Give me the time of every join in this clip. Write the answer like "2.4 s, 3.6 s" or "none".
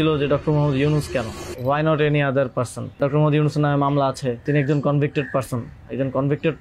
1.4 s, 3.0 s, 4.4 s